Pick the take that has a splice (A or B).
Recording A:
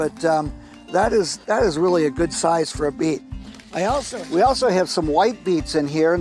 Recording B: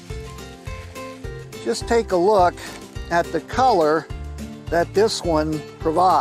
B